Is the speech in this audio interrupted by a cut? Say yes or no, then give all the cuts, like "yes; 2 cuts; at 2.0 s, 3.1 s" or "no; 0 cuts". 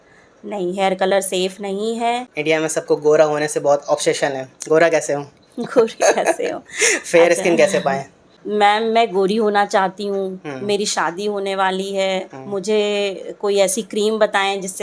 yes; 2 cuts; at 2.3 s, 8.4 s